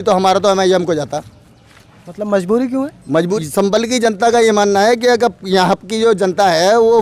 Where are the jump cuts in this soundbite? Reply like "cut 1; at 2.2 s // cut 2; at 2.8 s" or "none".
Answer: cut 1; at 3.4 s